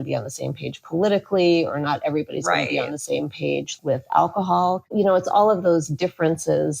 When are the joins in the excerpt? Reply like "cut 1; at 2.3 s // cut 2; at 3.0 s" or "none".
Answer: cut 1; at 4.8 s